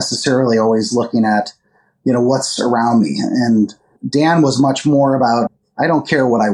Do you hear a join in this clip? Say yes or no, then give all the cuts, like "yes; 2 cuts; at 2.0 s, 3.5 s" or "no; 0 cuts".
yes; 2 cuts; at 4.0 s, 5.6 s